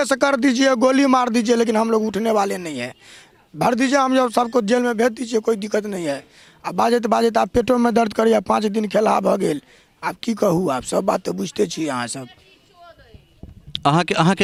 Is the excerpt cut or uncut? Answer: uncut